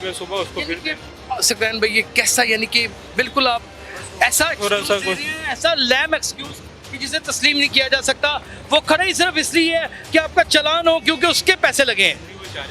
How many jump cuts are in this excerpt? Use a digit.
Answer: 0